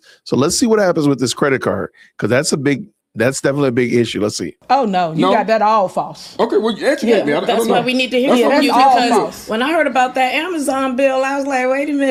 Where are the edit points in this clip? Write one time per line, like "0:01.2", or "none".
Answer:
none